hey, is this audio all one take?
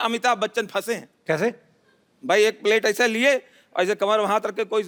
yes; 0 cuts

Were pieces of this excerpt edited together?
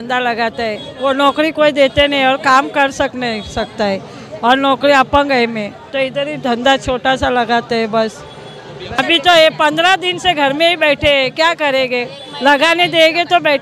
yes; 1 cut; at 9.0 s

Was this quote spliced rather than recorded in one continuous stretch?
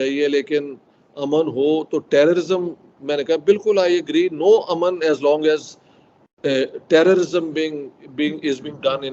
no; 0 cuts

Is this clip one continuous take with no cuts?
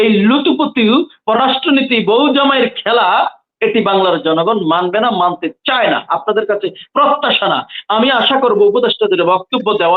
yes; 0 cuts

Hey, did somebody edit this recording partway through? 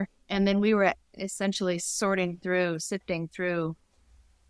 no; 0 cuts

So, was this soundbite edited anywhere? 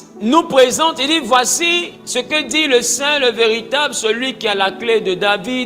no; 0 cuts

